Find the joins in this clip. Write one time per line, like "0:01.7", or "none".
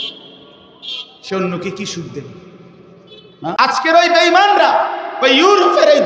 0:03.4